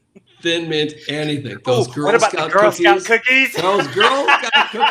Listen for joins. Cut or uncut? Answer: uncut